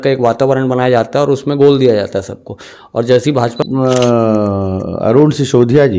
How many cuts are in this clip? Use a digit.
1